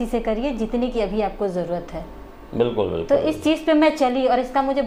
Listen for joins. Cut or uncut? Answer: uncut